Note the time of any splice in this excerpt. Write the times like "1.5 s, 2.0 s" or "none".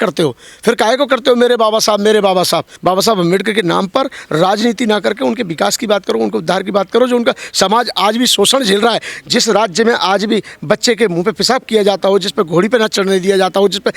2.7 s